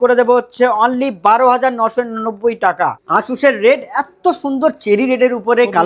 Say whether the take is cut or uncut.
cut